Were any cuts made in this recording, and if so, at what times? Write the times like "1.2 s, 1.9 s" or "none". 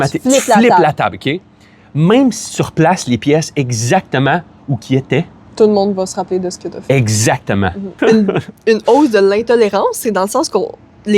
7.9 s